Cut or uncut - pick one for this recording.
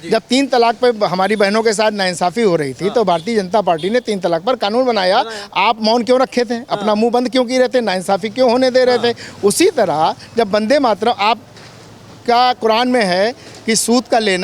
uncut